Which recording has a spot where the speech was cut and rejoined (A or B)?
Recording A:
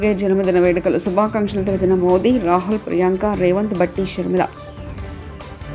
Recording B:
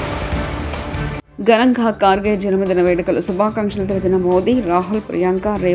B